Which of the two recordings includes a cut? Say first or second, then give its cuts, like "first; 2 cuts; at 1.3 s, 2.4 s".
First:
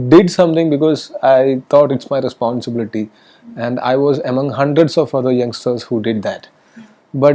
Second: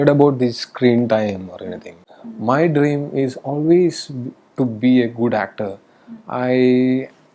second; 1 cut; at 2.0 s